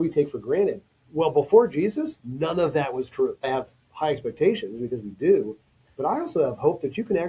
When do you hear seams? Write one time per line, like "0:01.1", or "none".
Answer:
0:03.5